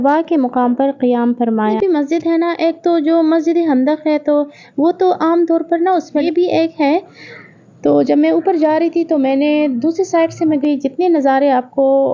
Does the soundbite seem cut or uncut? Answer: cut